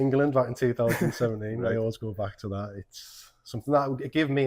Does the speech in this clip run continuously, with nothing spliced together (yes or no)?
yes